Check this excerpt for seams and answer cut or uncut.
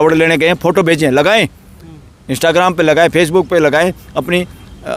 uncut